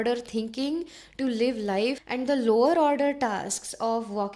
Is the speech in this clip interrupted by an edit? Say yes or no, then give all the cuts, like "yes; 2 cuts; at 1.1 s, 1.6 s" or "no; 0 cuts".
yes; 1 cut; at 2.0 s